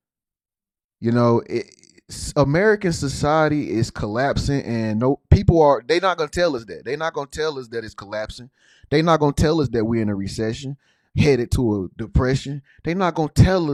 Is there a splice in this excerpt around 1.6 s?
no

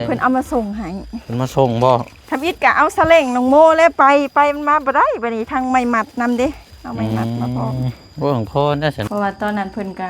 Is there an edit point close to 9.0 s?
yes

